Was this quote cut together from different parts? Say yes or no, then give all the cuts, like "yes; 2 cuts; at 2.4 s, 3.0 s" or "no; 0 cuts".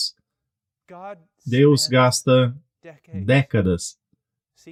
no; 0 cuts